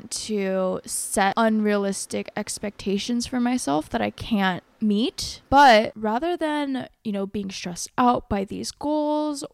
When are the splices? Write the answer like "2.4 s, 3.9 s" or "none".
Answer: 1.3 s, 4.7 s, 5.9 s